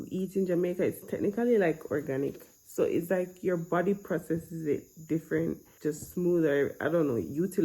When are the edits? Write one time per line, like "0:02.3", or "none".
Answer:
none